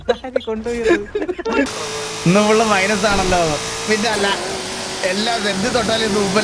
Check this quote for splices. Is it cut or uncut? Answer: cut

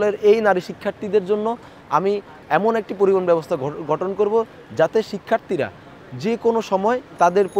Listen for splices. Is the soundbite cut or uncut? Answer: uncut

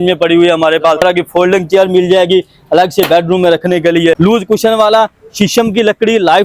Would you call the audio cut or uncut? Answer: cut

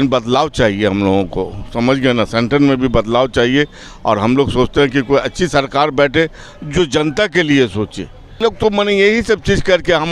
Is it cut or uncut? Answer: cut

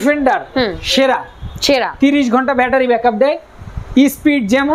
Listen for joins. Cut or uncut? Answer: uncut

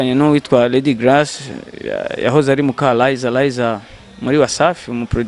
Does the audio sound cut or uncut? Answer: uncut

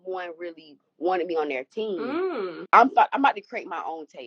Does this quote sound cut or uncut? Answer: cut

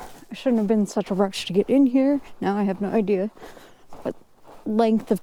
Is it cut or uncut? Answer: uncut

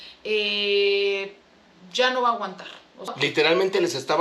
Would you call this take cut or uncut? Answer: cut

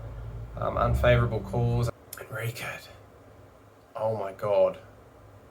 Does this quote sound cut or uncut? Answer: cut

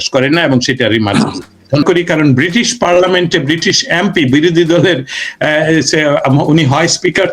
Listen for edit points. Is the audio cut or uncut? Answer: cut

